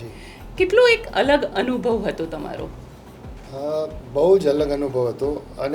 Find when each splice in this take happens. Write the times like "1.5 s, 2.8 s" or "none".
none